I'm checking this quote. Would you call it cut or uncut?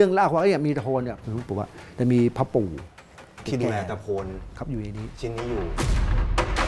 cut